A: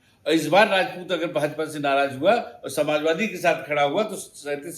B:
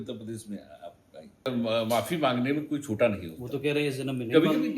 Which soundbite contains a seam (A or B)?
B